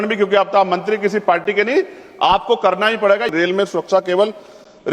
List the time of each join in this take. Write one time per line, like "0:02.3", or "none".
0:03.3

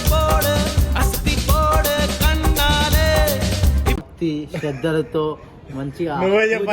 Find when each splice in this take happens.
0:04.0

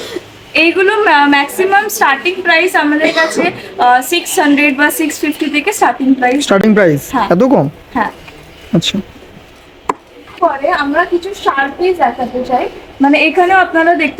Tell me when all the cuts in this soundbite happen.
none

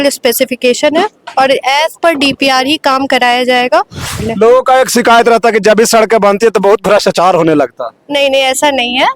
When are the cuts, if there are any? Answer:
0:04.2

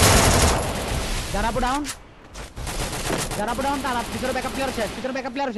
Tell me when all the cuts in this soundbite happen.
none

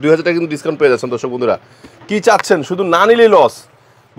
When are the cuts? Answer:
none

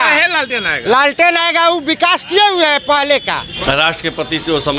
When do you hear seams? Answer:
0:03.5

